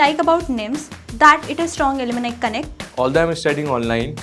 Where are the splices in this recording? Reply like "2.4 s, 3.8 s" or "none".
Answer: 2.9 s